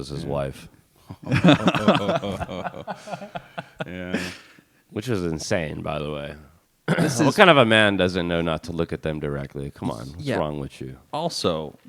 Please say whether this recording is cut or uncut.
uncut